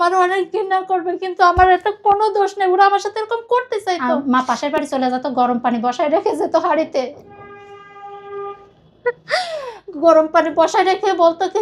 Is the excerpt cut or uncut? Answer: cut